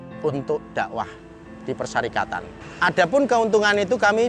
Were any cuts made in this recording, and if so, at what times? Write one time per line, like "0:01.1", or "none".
none

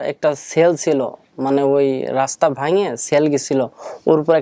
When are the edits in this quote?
none

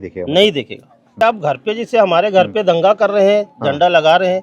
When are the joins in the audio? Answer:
0:01.2

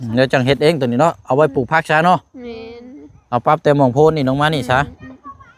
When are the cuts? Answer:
none

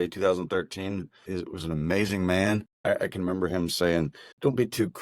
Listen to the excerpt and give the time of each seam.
0:02.7

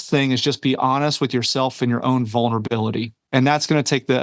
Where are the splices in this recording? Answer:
0:03.1

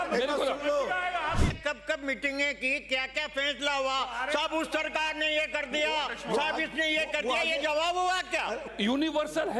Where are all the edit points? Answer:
0:01.5
0:08.6

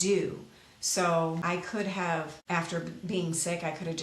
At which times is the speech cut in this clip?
0:01.4
0:02.4

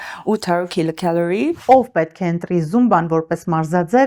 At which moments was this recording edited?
0:01.6

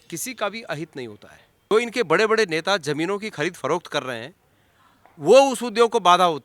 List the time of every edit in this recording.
0:01.7

